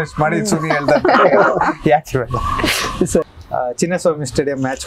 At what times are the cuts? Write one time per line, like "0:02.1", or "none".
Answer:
0:03.2

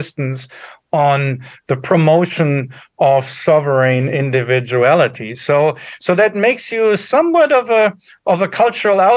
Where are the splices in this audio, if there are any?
none

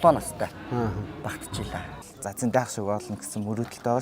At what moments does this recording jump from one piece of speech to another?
0:02.0

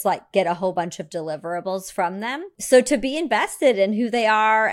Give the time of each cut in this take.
0:02.5

